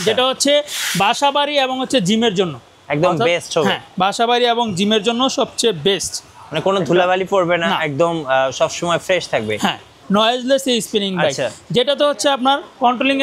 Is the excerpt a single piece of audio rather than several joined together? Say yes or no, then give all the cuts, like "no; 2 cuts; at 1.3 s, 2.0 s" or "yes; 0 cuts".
no; 1 cut; at 10.0 s